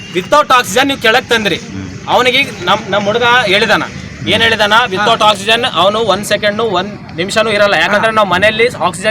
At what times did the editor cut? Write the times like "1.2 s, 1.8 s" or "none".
none